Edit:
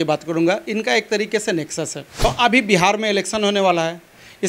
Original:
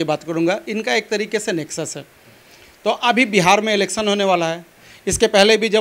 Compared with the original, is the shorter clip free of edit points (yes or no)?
no